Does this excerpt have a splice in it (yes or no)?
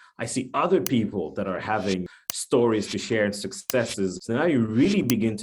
yes